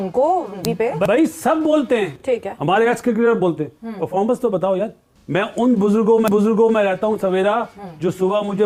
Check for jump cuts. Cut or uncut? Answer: uncut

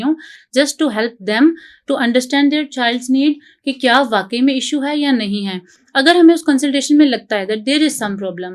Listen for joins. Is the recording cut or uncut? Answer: uncut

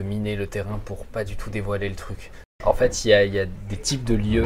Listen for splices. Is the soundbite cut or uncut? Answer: cut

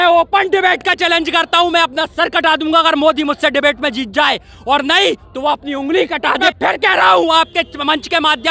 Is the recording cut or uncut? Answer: cut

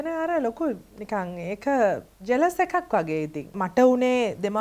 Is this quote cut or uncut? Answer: cut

